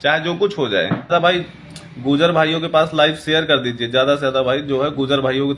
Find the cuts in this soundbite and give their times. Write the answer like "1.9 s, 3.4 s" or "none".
1.1 s

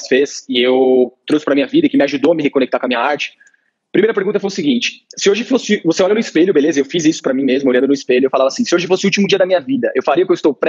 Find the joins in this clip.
none

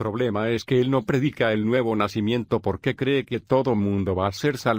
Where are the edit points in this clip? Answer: none

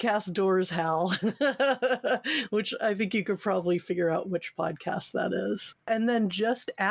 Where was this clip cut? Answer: 5.8 s

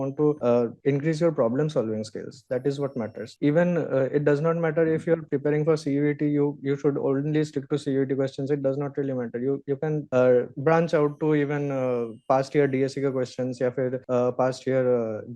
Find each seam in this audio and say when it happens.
3.3 s

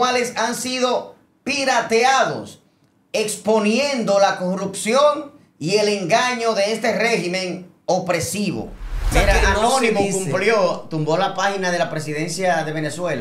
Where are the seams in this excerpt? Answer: 9.1 s

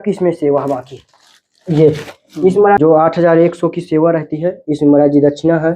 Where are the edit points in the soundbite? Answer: 2.8 s

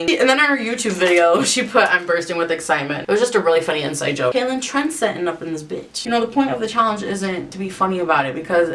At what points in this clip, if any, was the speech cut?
4.3 s, 6.0 s, 7.5 s

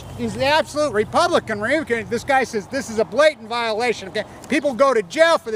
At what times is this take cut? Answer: 2.5 s

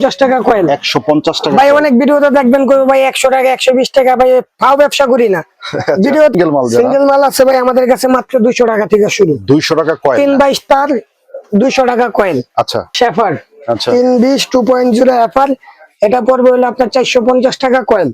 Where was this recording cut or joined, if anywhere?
6.3 s, 12.9 s

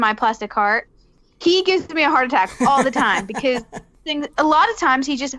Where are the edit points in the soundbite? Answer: 1.1 s, 4.0 s

